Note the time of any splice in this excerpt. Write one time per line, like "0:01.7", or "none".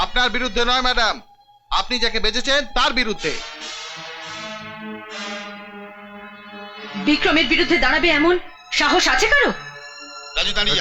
none